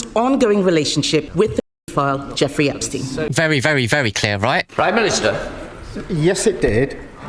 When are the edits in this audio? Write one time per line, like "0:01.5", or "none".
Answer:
0:01.3

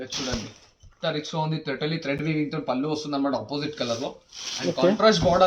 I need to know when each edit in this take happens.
none

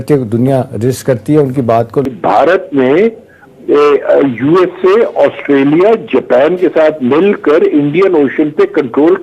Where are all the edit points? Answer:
0:02.1

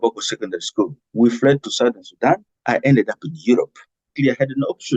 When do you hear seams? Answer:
0:01.0
0:02.5
0:04.1

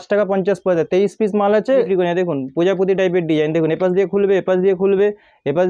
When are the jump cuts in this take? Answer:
0:01.8

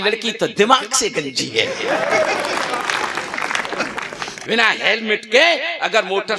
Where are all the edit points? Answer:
0:04.4

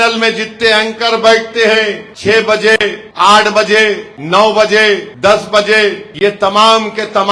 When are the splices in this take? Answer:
0:02.1
0:03.0
0:04.1
0:05.1
0:06.0

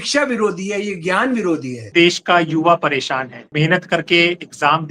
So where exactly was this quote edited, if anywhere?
0:01.9
0:03.5

